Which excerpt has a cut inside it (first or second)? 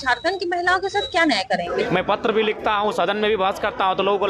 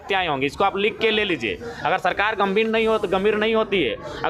first